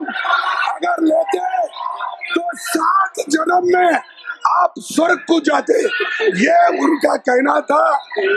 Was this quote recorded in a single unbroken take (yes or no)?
yes